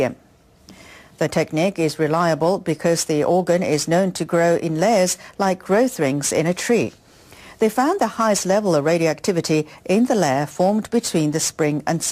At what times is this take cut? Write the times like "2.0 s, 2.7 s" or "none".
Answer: none